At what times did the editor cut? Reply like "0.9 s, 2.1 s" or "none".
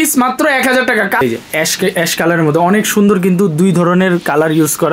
1.2 s